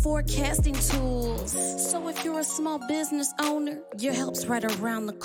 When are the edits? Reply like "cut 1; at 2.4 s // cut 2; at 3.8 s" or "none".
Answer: none